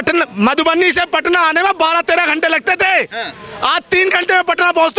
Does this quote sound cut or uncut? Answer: uncut